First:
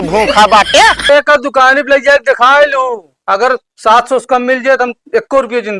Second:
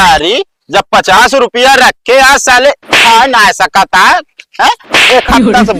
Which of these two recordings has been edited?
first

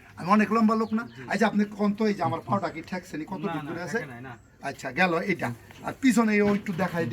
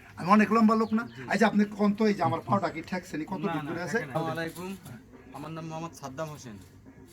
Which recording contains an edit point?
second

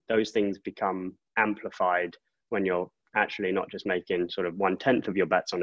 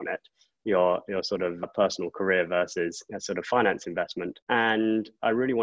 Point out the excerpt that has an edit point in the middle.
second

